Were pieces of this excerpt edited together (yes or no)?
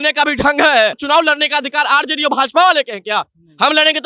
yes